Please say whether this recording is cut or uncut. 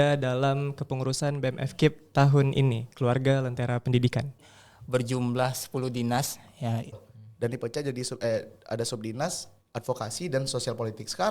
cut